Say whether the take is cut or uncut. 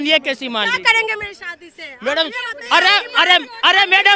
uncut